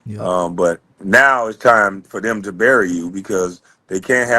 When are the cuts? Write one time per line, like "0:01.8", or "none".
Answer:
0:00.9